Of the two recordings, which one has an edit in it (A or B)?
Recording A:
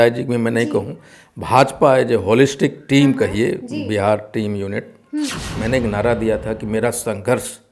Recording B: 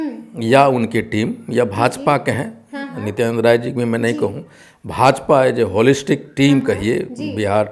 A